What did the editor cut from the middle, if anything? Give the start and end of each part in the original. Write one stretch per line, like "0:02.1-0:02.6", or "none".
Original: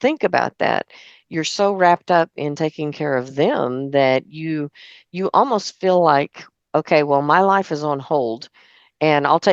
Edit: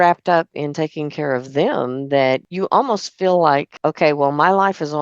0:04.3-0:05.1
0:06.3-0:06.6